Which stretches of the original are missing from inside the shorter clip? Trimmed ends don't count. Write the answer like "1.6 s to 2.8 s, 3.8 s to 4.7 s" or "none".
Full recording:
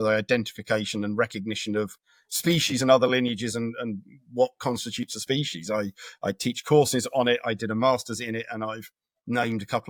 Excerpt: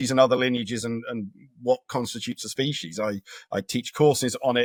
none